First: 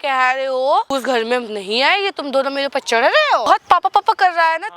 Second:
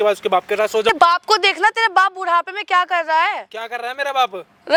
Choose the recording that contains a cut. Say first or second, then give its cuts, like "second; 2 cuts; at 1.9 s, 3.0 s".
first; 2 cuts; at 0.9 s, 3.4 s